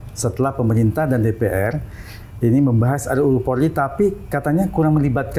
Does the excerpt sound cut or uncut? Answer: uncut